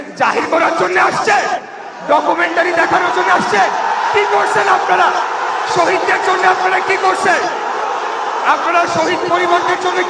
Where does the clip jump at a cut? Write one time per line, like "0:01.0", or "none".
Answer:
none